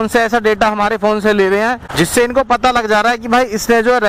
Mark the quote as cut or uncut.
uncut